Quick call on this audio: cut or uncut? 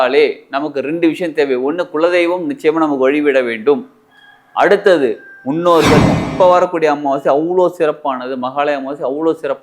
cut